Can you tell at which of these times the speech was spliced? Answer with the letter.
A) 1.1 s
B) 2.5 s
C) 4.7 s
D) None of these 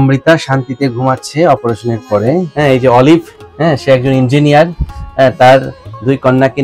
B